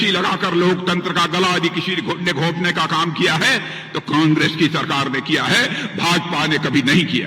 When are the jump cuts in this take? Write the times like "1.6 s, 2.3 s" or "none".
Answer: none